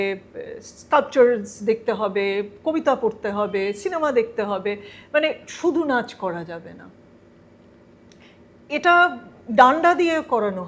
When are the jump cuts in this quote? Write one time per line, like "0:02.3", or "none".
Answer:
none